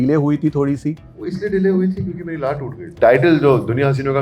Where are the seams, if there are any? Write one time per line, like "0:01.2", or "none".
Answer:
0:02.8